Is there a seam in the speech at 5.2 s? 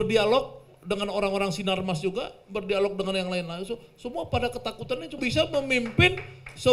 yes; 1 cut; at 5.2 s

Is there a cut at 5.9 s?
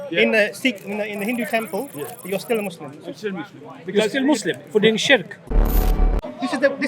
yes; 1 cut; at 5.9 s

